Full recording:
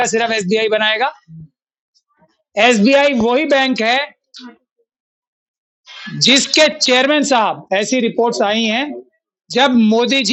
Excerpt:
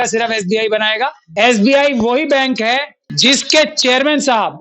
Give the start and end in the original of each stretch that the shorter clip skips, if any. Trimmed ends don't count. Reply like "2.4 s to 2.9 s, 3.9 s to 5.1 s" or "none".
1.2 s to 2.4 s, 4.2 s to 6.0 s

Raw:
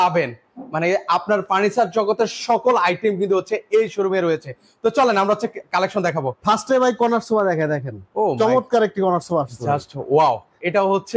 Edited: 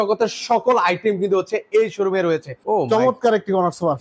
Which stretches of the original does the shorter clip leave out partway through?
4.5 s to 8.0 s

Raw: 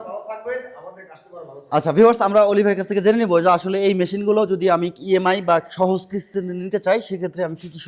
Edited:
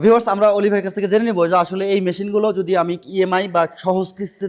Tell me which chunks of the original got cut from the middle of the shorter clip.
none

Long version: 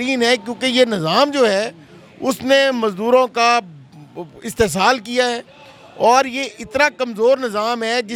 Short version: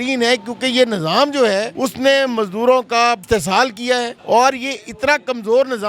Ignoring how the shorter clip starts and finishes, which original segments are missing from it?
1.7 s to 2.2 s, 3.7 s to 4.5 s, 5.4 s to 5.9 s

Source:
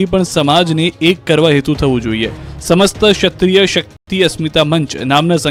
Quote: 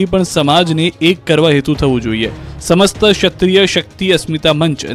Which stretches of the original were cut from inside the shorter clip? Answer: 3.9 s to 4.0 s

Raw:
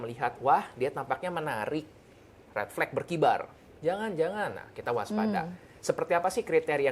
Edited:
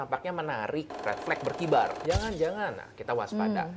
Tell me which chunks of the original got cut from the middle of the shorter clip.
1.9 s to 2.4 s, 3.5 s to 3.7 s

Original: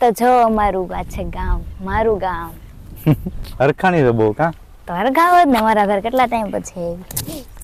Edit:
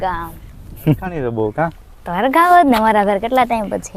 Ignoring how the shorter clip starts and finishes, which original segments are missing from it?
3.4 s to 4.1 s

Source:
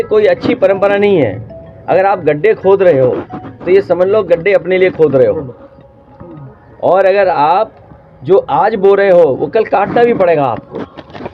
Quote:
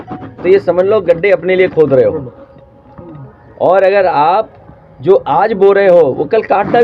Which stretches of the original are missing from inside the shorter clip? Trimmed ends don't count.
none

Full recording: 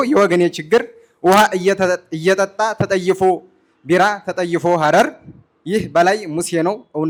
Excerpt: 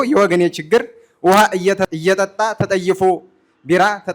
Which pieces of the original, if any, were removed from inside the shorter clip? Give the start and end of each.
1.9 s to 2.1 s

